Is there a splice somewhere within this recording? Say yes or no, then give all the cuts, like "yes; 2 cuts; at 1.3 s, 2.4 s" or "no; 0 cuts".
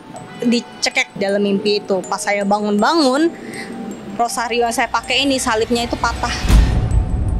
yes; 2 cuts; at 1.0 s, 6.4 s